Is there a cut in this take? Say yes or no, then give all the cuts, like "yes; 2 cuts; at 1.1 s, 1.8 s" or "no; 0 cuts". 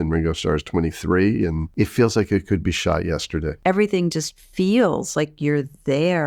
yes; 2 cuts; at 1.6 s, 3.5 s